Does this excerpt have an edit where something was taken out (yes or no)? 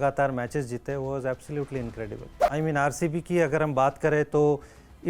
yes